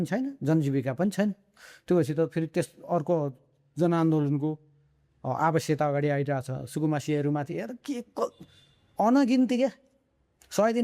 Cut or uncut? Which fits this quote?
uncut